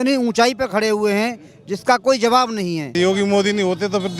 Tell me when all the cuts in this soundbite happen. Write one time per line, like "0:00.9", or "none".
0:02.9